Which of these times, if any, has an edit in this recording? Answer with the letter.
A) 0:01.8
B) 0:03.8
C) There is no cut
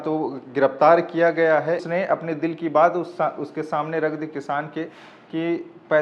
A